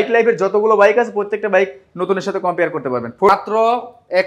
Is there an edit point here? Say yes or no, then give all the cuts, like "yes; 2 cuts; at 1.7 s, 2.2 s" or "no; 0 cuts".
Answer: yes; 1 cut; at 3.3 s